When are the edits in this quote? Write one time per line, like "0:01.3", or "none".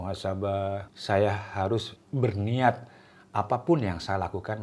0:00.9
0:02.0